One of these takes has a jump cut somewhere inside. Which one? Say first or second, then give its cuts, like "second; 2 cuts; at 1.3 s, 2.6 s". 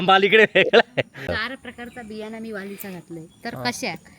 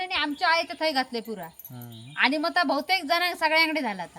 first; 1 cut; at 1.3 s